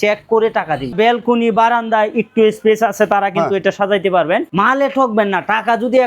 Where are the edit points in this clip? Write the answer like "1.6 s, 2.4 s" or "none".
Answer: 0.9 s, 4.5 s